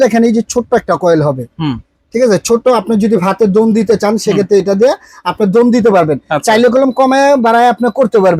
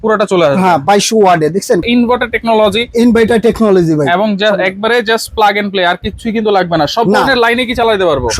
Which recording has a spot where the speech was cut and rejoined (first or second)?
second